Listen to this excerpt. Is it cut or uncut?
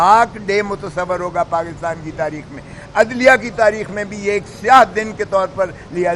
uncut